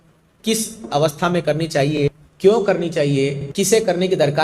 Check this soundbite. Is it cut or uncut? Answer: cut